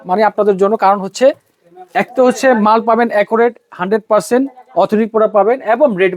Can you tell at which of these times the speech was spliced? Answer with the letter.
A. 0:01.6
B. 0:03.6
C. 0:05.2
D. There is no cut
D